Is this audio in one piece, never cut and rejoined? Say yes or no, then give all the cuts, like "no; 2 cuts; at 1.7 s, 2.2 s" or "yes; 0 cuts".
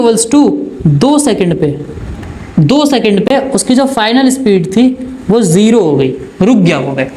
yes; 0 cuts